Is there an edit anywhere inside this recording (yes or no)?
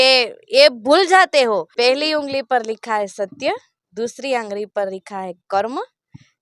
yes